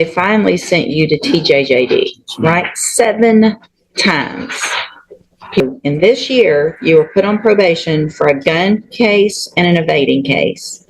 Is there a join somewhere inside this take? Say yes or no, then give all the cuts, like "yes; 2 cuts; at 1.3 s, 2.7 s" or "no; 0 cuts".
yes; 1 cut; at 5.6 s